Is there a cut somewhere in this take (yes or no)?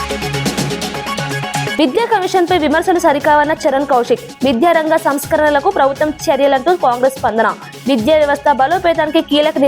yes